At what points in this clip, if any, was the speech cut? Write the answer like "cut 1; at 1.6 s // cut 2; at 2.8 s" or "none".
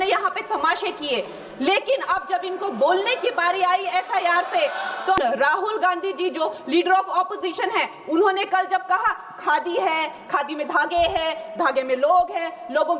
cut 1; at 5.2 s

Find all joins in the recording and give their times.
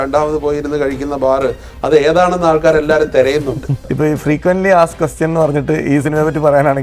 cut 1; at 3.8 s

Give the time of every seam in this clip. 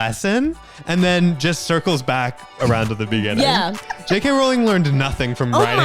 none

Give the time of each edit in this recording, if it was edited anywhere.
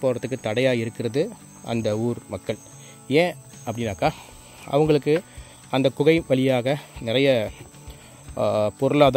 none

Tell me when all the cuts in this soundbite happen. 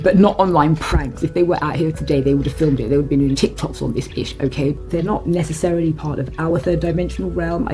cut 1; at 4.8 s

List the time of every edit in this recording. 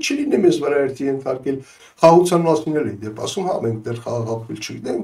cut 1; at 1.7 s

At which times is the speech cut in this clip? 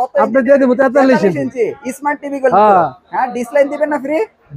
none

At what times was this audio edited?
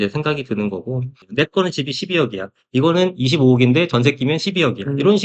cut 1; at 1.2 s

